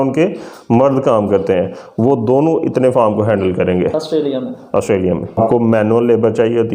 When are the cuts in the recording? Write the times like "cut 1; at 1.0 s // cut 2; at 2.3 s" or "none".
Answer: cut 1; at 5.4 s